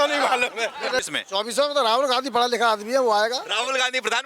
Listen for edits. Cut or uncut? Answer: cut